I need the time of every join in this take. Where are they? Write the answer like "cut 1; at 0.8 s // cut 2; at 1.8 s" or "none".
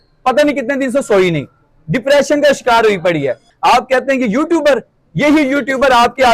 cut 1; at 3.5 s